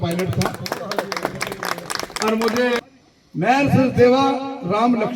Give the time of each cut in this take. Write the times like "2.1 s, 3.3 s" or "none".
2.8 s